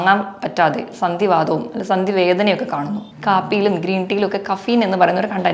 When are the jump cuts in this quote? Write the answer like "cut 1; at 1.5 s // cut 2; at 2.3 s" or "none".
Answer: cut 1; at 3.0 s